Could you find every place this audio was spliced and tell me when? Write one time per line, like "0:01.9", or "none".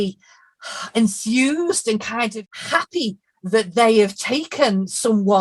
0:02.3